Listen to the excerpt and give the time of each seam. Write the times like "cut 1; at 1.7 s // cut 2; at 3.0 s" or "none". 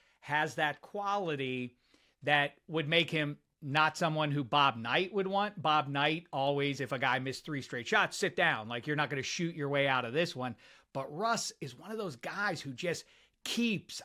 none